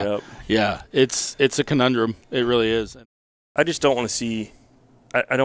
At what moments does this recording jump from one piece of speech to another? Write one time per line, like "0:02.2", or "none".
0:03.0